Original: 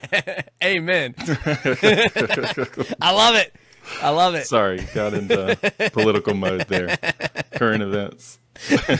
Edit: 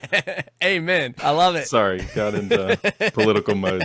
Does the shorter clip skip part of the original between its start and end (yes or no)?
yes